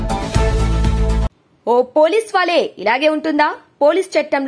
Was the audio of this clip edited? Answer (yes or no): no